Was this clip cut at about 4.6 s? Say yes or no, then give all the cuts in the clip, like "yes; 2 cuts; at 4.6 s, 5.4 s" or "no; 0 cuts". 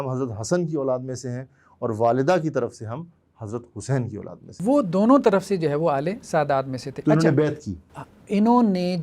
yes; 1 cut; at 4.6 s